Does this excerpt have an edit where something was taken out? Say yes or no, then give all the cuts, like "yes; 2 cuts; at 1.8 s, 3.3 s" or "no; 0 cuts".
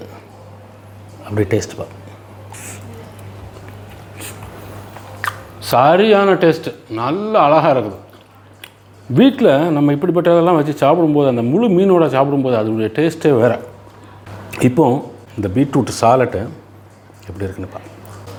no; 0 cuts